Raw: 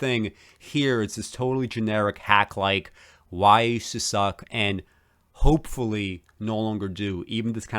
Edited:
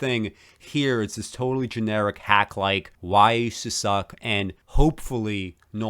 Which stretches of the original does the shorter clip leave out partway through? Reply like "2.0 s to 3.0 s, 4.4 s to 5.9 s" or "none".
2.9 s to 3.2 s, 4.9 s to 5.3 s

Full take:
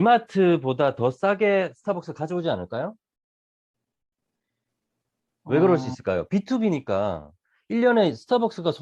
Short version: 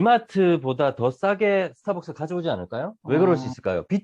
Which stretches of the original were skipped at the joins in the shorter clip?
3.0 s to 5.4 s

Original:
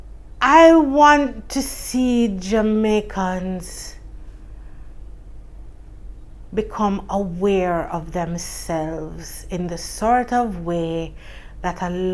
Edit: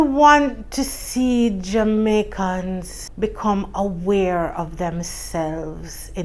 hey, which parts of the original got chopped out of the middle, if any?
3.8 s to 6.3 s

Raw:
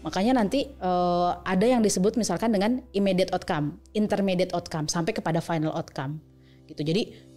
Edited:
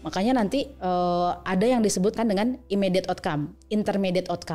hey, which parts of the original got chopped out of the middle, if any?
2.1 s to 2.4 s

